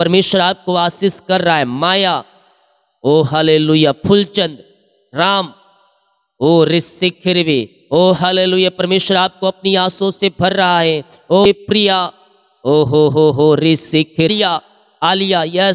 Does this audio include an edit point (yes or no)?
yes